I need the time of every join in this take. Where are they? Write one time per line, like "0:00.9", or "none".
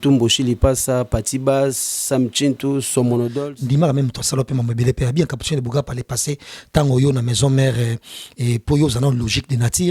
0:03.5